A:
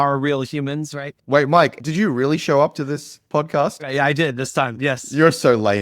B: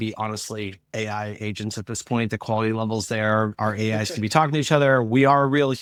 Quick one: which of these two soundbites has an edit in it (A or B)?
A